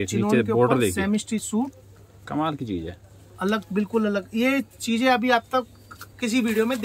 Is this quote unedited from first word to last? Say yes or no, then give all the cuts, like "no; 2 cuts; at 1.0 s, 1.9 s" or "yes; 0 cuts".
yes; 0 cuts